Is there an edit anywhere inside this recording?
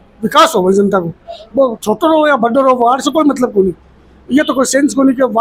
no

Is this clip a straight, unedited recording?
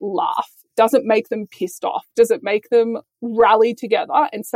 no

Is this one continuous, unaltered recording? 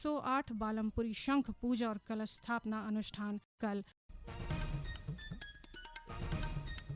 no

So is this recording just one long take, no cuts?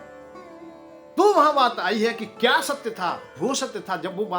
no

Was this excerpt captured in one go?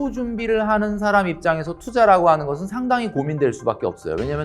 yes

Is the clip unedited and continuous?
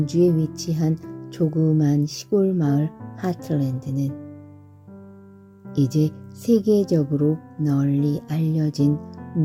yes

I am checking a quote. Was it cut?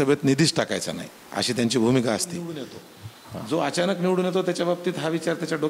yes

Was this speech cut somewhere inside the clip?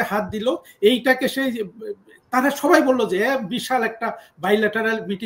no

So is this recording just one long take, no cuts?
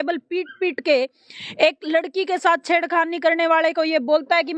yes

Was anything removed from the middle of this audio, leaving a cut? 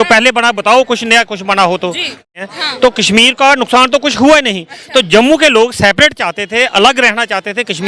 yes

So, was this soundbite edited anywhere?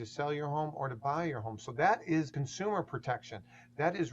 yes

